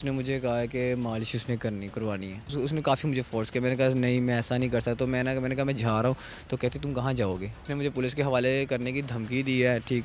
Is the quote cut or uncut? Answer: cut